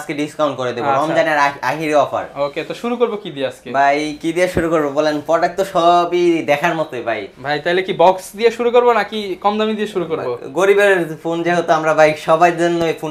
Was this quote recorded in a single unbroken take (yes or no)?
yes